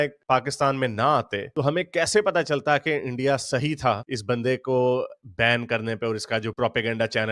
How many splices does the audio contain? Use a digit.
0